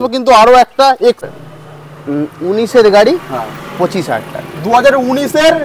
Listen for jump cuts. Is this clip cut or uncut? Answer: cut